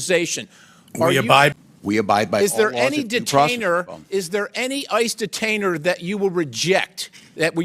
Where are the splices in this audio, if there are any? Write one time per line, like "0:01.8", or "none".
0:01.5